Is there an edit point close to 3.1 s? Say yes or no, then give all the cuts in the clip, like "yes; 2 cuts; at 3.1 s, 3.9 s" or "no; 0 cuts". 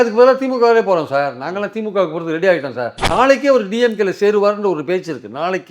yes; 1 cut; at 3.1 s